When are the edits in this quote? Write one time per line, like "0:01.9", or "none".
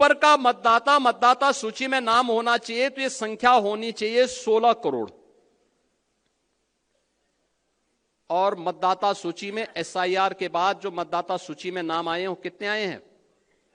none